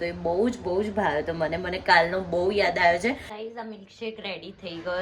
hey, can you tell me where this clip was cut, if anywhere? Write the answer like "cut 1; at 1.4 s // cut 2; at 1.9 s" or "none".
cut 1; at 3.5 s